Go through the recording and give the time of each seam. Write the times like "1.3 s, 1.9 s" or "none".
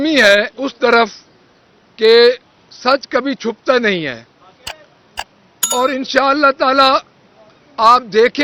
none